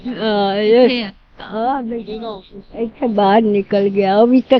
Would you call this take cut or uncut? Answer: uncut